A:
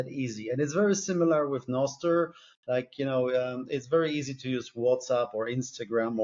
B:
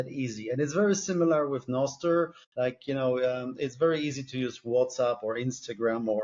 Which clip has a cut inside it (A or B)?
B